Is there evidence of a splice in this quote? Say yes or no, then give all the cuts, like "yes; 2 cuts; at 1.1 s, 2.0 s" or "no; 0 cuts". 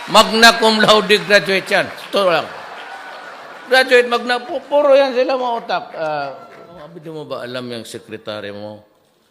yes; 1 cut; at 6.9 s